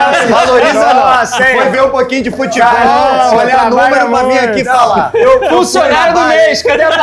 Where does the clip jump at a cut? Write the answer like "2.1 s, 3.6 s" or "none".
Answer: none